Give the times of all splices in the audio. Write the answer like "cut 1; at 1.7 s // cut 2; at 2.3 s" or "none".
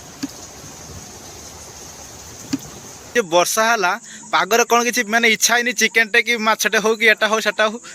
cut 1; at 3.1 s

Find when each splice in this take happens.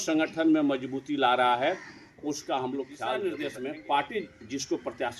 cut 1; at 3.2 s

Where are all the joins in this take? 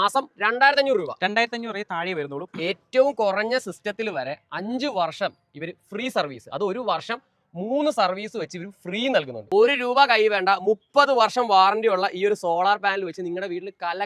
cut 1; at 2.4 s // cut 2; at 9.4 s

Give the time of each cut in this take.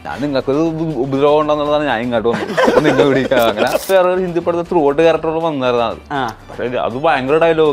cut 1; at 3.8 s

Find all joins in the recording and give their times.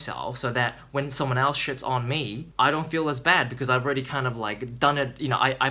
cut 1; at 2.4 s

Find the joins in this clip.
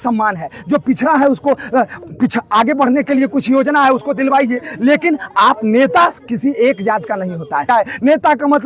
cut 1; at 7.7 s

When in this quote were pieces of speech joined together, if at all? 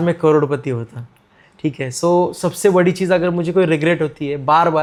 none

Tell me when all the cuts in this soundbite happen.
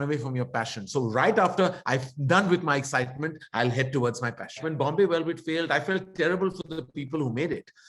cut 1; at 4.6 s

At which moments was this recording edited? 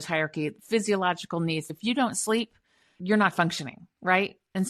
cut 1; at 1.7 s // cut 2; at 3.0 s

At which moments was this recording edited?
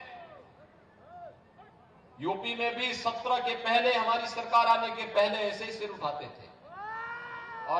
none

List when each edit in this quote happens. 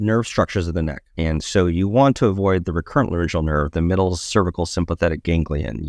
cut 1; at 1.0 s

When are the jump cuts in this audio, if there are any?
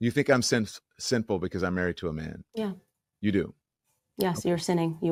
none

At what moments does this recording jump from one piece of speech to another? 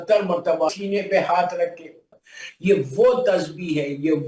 cut 1; at 0.7 s // cut 2; at 1.8 s

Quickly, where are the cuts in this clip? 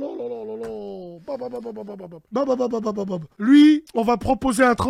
cut 1; at 2.1 s // cut 2; at 3.2 s // cut 3; at 3.9 s

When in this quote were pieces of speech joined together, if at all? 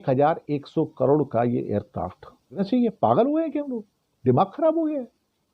cut 1; at 2.6 s

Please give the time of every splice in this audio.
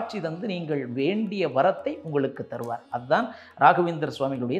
none

